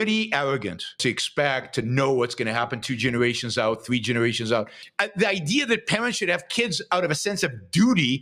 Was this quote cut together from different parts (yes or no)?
yes